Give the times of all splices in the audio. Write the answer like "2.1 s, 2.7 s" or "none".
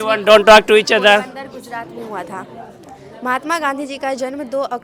none